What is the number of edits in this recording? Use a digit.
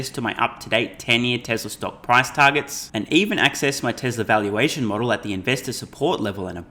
0